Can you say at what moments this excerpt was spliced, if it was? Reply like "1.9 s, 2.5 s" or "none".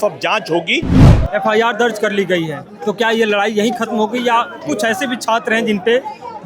1.1 s